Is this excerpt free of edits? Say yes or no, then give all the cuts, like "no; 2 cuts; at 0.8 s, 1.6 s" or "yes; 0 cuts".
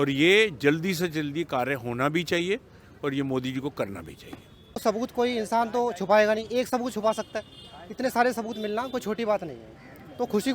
no; 1 cut; at 4.8 s